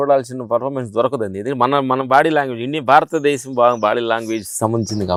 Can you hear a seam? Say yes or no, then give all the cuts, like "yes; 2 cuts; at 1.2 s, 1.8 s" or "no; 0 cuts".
no; 0 cuts